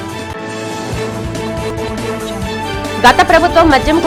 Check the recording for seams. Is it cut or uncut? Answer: uncut